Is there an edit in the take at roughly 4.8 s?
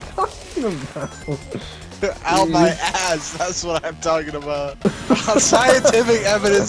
yes; 1 cut; at 4.8 s

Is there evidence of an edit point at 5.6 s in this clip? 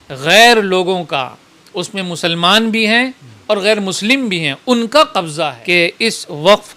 yes; 1 cut; at 5.6 s

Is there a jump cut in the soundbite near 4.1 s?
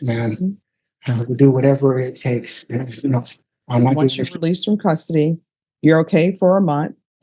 yes; 1 cut; at 4.1 s

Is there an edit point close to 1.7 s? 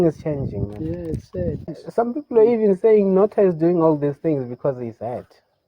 yes; 1 cut; at 1.7 s

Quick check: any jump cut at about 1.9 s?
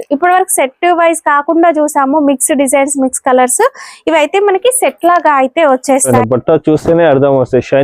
no; 1 cut; at 6.1 s

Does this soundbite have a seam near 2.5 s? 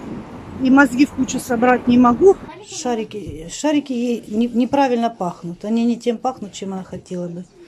yes; 1 cut; at 2.5 s

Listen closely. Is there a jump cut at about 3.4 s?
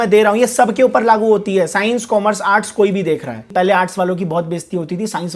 yes; 1 cut; at 3.4 s

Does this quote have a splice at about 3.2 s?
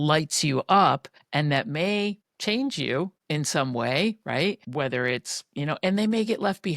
yes; 4 cuts; at 1.1 s, 2.3 s, 3.2 s, 4.6 s

